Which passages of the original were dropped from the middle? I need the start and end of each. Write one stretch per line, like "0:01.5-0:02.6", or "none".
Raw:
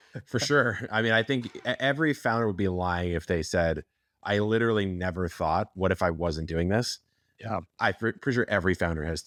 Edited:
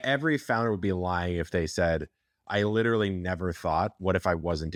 none